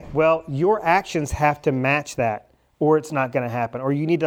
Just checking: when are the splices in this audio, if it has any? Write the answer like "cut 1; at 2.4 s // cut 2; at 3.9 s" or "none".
none

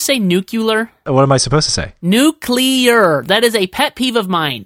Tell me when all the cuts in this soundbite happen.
cut 1; at 1.1 s

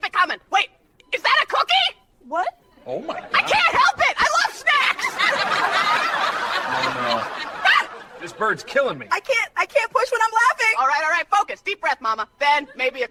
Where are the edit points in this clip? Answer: none

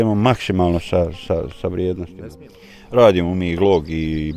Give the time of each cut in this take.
cut 1; at 2.2 s

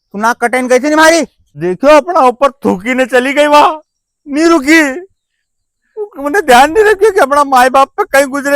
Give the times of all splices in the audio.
cut 1; at 1.4 s

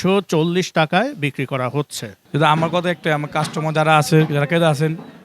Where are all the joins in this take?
cut 1; at 2.2 s

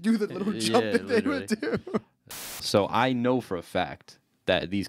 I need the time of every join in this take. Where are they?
cut 1; at 2.5 s

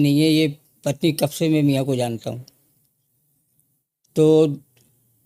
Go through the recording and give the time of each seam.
none

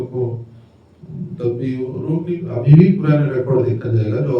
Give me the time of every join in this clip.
cut 1; at 2.6 s

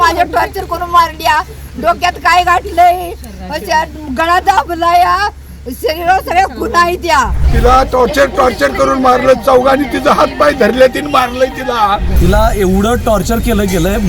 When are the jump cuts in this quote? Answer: cut 1; at 7.4 s // cut 2; at 12.1 s

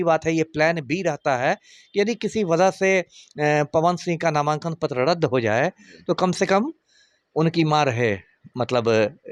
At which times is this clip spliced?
none

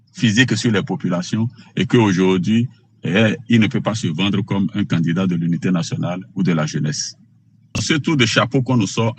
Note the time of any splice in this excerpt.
cut 1; at 7.8 s

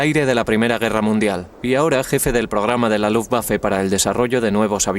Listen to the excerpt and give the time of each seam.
cut 1; at 1.7 s

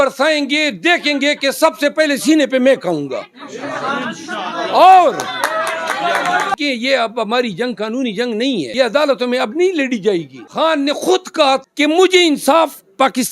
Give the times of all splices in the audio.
cut 1; at 6.5 s // cut 2; at 8.7 s // cut 3; at 10.4 s // cut 4; at 11.6 s

